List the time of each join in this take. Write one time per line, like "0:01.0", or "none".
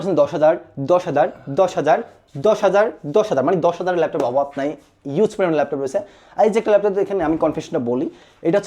none

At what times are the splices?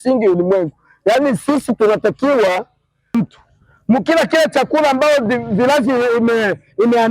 0:03.1

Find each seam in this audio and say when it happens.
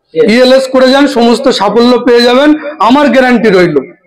none

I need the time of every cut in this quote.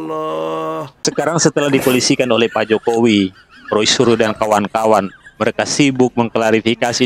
0:00.9

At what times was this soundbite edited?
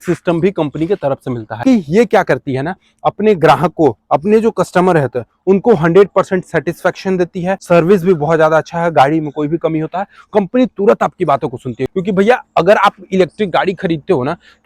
0:01.6
0:07.6
0:11.9

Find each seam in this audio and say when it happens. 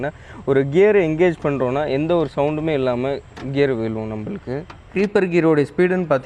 0:04.8

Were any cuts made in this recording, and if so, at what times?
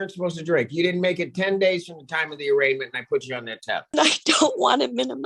0:03.9

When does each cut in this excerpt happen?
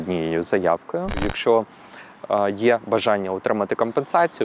0:01.2

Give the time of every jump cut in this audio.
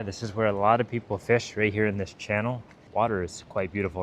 0:02.7

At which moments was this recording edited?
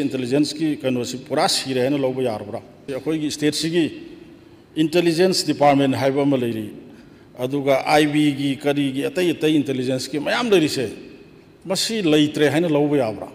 0:02.9

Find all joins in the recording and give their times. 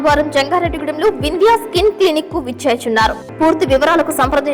0:03.2

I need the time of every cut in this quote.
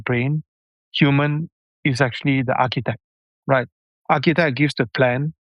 none

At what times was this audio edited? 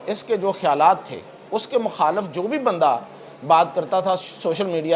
none

